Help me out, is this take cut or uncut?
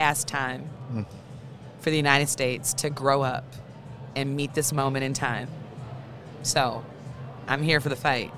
uncut